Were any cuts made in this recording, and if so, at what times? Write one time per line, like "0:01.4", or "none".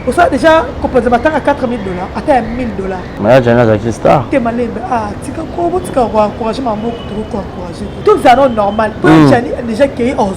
0:03.1
0:07.9